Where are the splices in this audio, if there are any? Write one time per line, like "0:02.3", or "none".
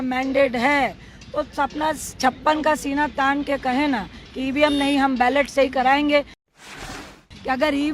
0:06.9